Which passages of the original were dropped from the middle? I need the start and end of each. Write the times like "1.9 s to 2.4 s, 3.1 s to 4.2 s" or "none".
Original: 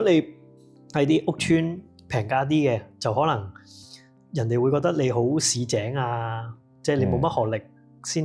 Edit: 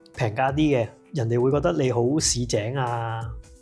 2.9 s to 4.2 s